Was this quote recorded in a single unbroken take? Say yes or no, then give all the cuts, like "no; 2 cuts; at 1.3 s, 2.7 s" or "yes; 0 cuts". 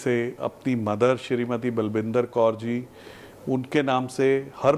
yes; 0 cuts